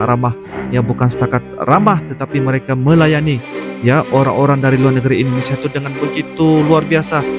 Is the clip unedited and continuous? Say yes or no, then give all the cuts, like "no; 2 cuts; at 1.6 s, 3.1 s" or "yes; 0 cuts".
yes; 0 cuts